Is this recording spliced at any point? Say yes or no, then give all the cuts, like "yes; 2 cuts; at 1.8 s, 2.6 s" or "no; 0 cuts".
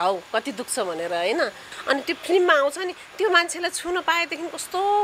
yes; 1 cut; at 1.7 s